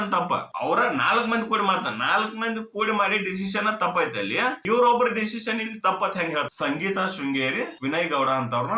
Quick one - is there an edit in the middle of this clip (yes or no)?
yes